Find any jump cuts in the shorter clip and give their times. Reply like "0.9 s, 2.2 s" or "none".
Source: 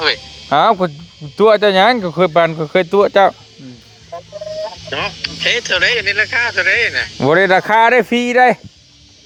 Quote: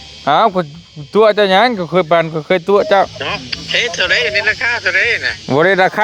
3.1 s